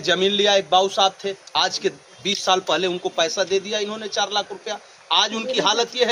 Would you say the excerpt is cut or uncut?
uncut